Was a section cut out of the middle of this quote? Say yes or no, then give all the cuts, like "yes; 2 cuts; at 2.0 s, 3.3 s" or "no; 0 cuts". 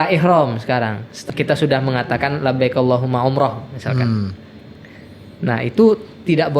yes; 1 cut; at 1.2 s